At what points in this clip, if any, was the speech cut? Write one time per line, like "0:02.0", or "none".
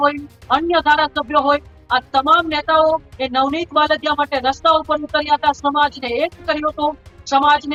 none